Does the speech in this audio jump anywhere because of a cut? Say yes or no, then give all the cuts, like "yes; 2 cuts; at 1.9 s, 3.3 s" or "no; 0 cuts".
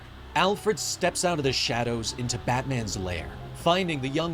no; 0 cuts